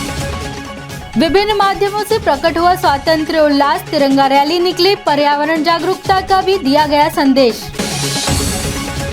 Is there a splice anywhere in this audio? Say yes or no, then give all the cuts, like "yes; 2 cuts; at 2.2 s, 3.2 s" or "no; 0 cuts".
no; 0 cuts